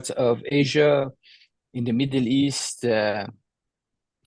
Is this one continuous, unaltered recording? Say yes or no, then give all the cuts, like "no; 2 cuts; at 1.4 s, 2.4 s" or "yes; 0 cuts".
yes; 0 cuts